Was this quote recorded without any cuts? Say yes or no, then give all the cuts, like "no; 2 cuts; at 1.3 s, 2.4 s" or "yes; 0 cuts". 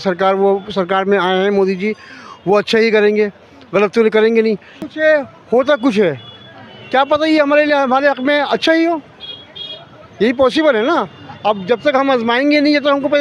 no; 1 cut; at 4.7 s